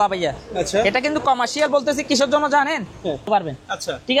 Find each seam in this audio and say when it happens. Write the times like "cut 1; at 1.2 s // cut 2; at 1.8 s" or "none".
cut 1; at 3.3 s